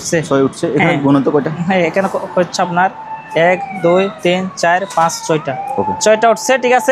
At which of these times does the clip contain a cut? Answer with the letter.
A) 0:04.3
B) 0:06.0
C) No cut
C